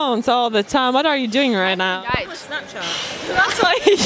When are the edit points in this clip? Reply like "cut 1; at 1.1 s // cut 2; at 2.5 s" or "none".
none